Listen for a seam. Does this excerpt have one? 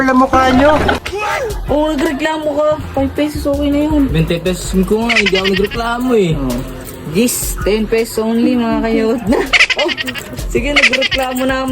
yes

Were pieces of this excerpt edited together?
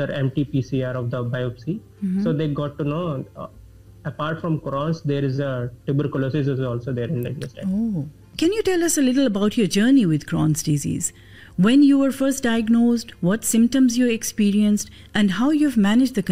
yes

